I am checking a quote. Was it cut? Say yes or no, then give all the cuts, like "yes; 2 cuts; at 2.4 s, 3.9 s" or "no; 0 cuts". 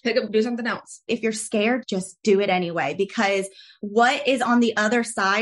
yes; 1 cut; at 0.9 s